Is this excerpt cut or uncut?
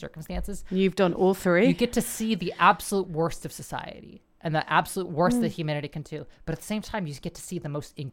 uncut